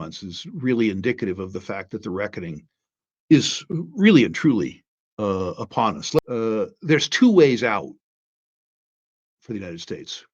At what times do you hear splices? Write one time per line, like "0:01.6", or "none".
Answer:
0:06.2